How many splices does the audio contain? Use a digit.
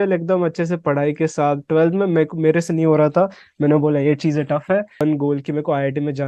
1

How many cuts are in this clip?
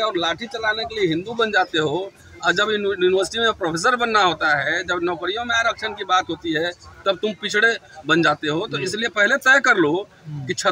0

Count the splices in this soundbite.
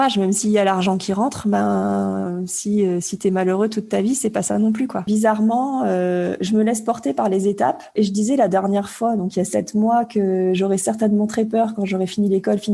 2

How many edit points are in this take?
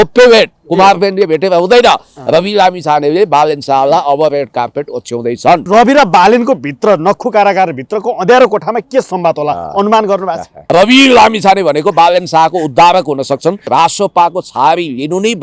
2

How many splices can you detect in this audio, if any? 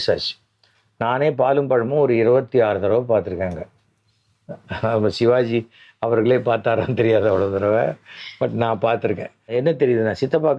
1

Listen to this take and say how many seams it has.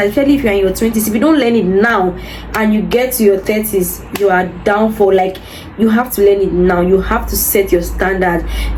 0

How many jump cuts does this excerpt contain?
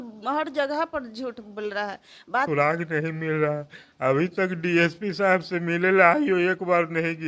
1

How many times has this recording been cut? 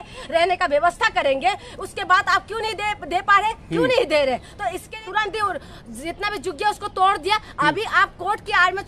1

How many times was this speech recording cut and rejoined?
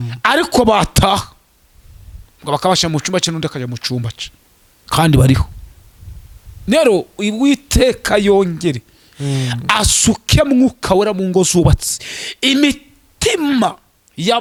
0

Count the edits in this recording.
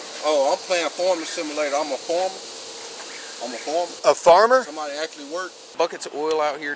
2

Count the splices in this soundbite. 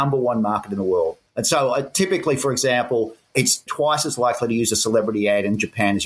2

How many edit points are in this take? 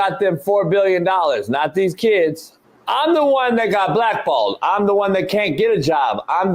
0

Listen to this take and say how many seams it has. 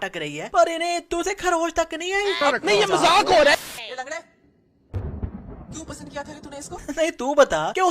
3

